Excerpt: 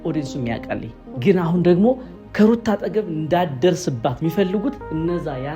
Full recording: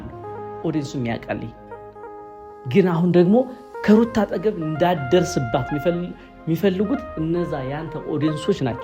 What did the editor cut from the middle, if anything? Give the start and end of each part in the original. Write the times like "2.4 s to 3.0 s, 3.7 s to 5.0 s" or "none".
1.6 s to 2.5 s, 5.6 s to 6.4 s